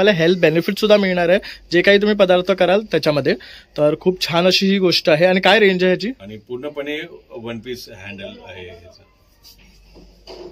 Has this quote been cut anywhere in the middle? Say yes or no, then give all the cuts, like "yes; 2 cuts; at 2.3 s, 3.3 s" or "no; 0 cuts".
no; 0 cuts